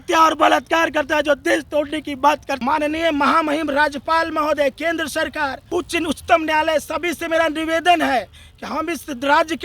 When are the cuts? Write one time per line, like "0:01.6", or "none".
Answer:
0:02.6